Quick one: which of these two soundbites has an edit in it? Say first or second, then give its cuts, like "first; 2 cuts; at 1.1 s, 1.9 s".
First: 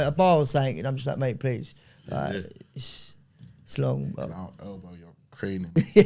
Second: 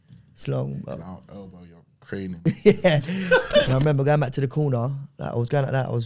second; 1 cut; at 3.7 s